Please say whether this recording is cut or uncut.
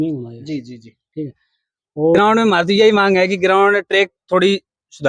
cut